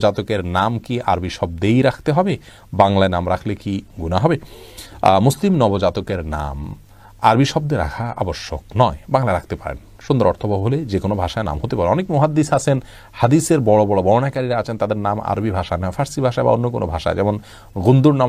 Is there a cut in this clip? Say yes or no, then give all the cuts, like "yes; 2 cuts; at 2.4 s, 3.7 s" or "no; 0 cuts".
no; 0 cuts